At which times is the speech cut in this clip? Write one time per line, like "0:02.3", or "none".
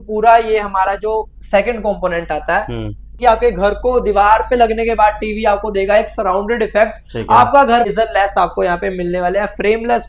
0:03.1
0:07.9